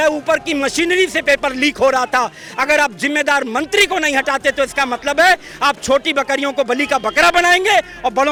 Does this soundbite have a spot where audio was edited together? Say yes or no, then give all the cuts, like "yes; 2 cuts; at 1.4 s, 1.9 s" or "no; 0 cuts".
no; 0 cuts